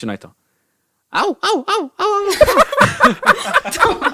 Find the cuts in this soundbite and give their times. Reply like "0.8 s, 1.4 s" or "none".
none